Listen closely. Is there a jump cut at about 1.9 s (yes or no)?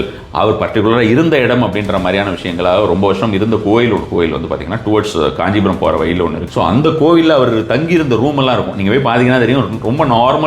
no